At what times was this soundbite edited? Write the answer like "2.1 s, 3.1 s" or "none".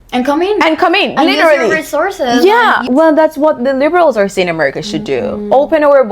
2.8 s